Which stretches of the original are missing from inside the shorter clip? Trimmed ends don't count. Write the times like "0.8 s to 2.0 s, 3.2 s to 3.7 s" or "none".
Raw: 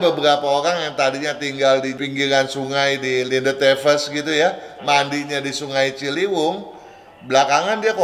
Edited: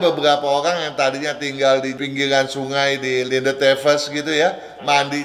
none